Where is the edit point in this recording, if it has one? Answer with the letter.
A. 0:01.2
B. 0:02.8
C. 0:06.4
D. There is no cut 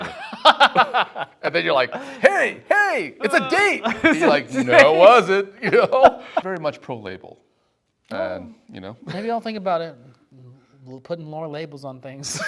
C